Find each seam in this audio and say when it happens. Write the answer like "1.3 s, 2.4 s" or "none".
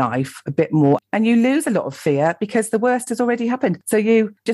1.0 s